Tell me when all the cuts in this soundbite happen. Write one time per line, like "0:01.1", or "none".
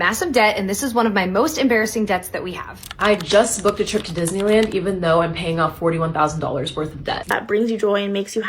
0:02.8
0:07.3